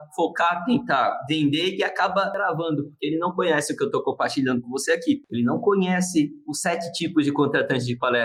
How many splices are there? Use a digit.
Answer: 0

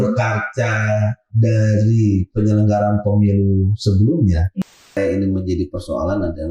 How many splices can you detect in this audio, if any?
1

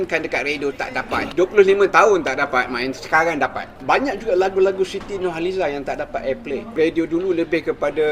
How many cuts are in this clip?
1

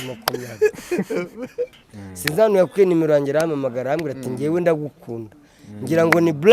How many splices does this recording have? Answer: 1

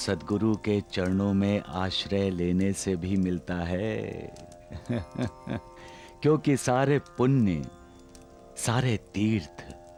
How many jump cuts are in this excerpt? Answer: 0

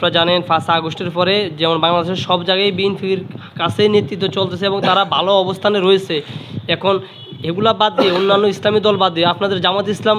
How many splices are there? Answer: 0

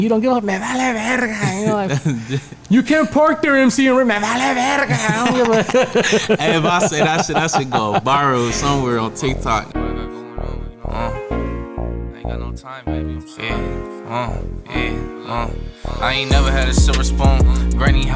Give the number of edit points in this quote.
1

